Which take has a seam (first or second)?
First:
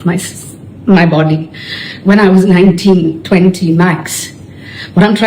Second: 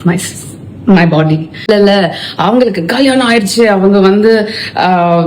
second